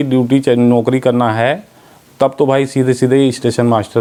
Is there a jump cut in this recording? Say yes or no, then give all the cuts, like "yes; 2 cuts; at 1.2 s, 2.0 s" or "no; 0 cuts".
no; 0 cuts